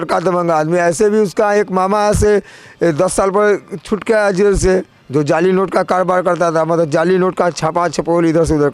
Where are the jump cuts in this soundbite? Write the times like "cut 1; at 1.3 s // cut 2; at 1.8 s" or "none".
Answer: none